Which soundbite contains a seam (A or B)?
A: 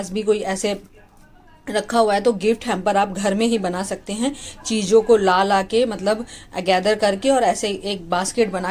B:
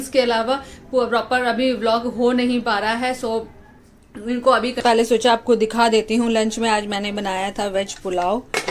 B